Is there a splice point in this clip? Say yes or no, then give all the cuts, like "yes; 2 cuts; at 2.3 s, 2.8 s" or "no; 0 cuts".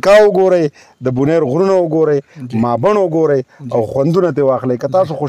no; 0 cuts